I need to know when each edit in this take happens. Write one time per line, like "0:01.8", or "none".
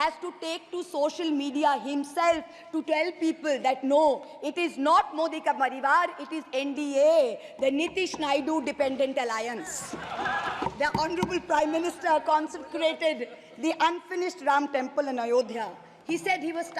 0:10.6